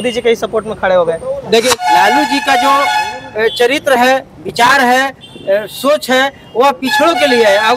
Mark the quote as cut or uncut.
cut